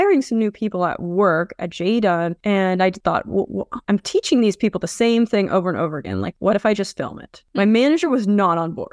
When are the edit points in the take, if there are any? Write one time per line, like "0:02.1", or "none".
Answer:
none